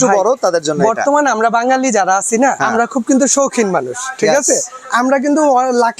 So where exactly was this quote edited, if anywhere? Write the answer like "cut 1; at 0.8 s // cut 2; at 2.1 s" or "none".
cut 1; at 2.6 s